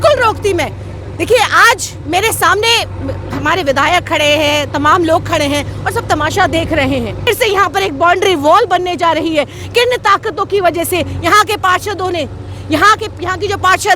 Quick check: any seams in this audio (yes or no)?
yes